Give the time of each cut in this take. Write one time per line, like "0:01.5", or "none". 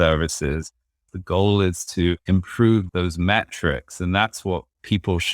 0:01.1